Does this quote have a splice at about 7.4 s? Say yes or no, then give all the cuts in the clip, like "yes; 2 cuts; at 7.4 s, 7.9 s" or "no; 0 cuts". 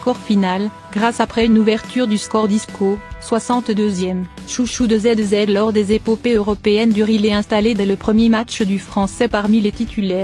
no; 0 cuts